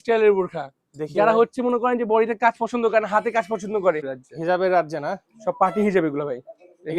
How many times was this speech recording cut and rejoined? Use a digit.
1